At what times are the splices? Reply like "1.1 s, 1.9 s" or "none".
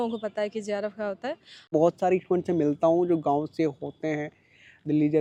none